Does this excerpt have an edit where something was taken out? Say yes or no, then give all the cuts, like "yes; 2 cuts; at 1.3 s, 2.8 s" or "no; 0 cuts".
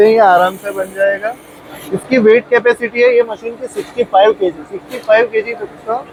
no; 0 cuts